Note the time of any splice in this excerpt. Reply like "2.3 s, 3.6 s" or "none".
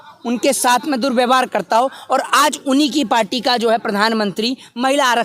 none